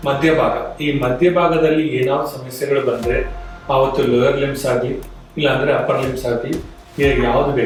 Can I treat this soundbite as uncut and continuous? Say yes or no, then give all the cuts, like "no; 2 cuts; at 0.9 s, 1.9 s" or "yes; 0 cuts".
yes; 0 cuts